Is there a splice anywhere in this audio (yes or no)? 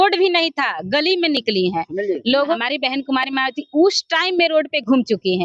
yes